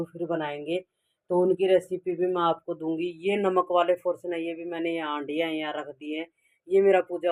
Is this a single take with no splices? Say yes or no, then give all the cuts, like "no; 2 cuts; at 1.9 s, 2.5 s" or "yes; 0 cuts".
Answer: yes; 0 cuts